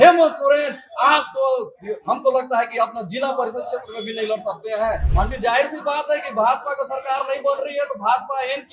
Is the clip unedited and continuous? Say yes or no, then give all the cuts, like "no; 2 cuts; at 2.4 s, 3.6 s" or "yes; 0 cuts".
no; 1 cut; at 5.1 s